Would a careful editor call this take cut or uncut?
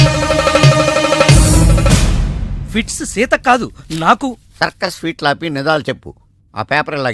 uncut